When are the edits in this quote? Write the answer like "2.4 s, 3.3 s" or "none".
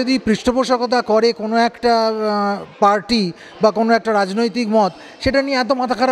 none